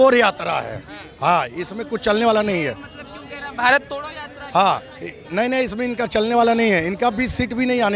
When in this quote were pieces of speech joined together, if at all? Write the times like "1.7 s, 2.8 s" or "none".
none